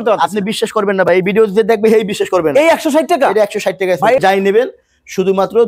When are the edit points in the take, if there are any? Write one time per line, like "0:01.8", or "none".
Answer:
0:04.2

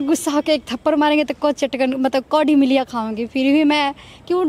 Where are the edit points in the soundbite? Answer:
none

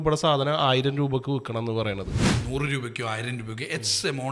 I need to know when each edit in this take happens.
0:02.3

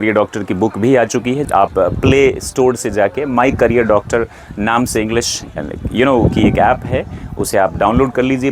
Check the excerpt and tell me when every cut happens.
0:01.4

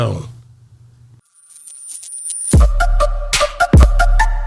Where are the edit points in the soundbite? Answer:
0:01.3

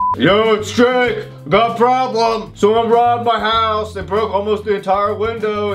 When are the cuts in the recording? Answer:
none

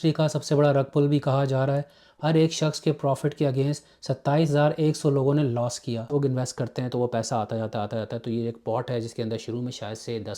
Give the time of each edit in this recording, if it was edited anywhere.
0:02.0
0:06.1

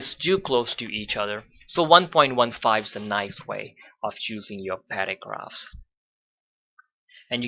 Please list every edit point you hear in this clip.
none

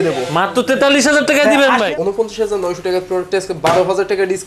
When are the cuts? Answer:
0:01.9

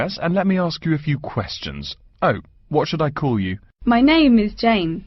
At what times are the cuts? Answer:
0:03.6

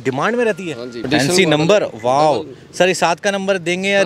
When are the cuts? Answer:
0:00.9

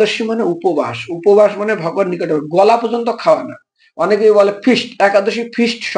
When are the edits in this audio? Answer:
none

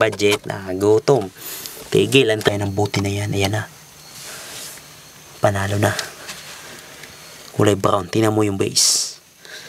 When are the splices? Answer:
0:02.5

